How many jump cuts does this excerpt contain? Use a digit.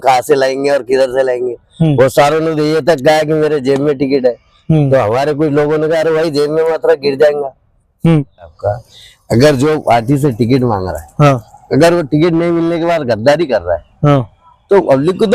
1